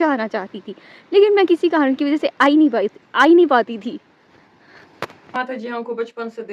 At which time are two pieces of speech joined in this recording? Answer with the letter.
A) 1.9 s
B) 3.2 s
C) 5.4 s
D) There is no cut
C